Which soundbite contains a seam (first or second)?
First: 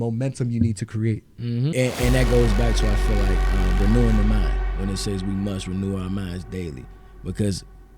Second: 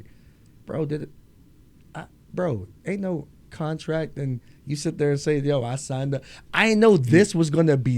first